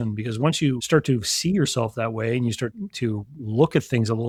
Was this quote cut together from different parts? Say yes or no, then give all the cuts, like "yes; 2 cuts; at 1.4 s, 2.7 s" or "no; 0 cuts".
no; 0 cuts